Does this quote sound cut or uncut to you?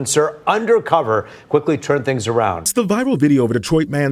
cut